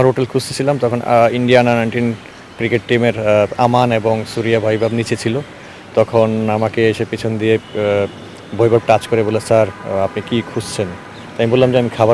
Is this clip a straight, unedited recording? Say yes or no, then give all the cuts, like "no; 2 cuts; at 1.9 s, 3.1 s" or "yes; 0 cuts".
yes; 0 cuts